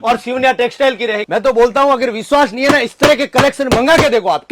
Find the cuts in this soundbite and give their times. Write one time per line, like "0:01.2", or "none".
0:01.2